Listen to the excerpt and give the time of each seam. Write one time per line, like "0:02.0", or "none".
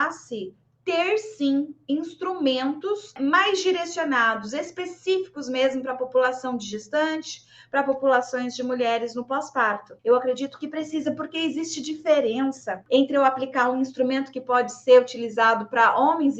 0:03.1
0:09.9
0:12.8